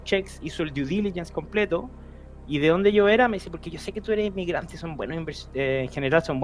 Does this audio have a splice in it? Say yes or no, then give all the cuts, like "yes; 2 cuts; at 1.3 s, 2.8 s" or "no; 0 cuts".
no; 0 cuts